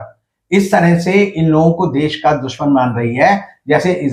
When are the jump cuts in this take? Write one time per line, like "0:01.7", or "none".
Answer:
none